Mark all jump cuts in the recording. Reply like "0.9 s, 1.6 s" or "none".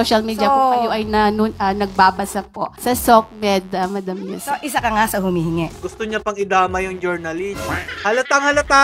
none

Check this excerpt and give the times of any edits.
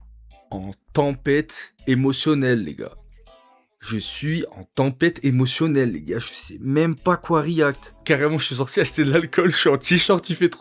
none

